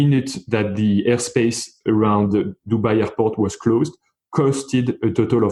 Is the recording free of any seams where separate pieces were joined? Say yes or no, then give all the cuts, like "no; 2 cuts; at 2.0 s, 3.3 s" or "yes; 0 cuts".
yes; 0 cuts